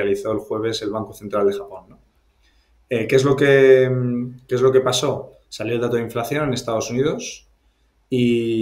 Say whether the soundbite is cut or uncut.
uncut